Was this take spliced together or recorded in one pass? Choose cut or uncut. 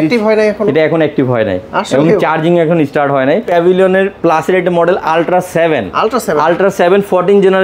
cut